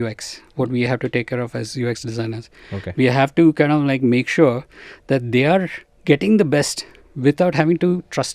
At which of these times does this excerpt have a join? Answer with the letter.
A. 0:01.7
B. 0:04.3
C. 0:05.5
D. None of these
D